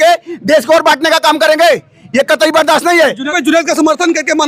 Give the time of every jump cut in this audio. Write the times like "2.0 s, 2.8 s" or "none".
3.3 s